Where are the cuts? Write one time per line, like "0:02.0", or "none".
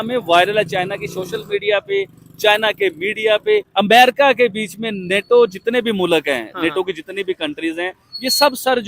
0:03.7